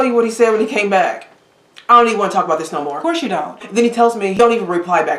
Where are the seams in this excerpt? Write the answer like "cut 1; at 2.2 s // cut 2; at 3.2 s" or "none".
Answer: cut 1; at 3.6 s